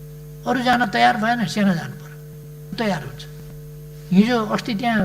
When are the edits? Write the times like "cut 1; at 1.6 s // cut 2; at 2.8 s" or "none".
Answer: cut 1; at 2.7 s